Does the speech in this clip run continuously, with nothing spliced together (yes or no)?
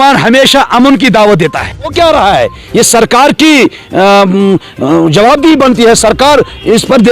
no